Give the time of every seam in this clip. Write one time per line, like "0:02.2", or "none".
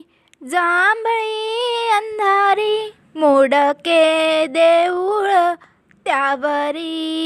0:03.0